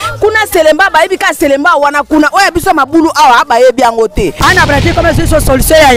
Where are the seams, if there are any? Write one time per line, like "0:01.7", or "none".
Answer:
0:04.4